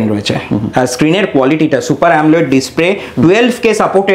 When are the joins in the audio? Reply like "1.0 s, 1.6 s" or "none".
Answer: none

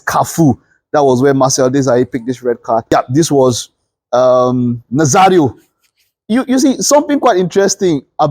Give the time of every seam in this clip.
2.9 s

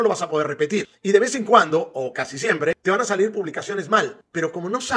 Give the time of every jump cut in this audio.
none

